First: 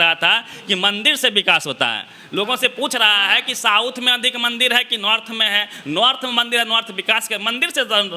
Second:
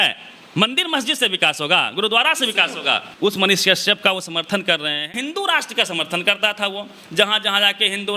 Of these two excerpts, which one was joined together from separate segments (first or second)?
second